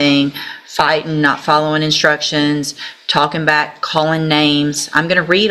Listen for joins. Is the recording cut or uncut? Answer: uncut